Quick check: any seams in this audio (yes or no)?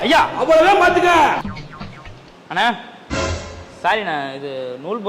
yes